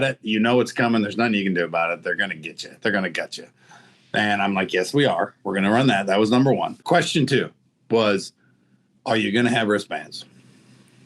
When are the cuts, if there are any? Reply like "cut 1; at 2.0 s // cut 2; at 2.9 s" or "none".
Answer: cut 1; at 6.8 s